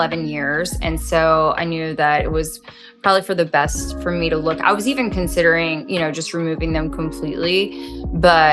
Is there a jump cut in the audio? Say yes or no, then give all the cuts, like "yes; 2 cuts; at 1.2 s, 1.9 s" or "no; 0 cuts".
no; 0 cuts